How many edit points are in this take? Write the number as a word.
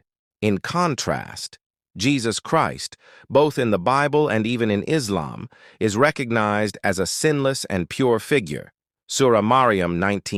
zero